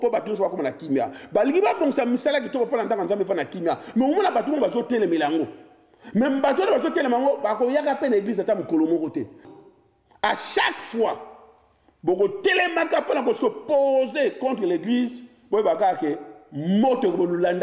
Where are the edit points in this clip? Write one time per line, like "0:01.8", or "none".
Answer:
0:09.5